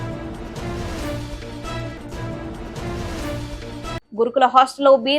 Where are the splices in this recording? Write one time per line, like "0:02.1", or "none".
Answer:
0:04.0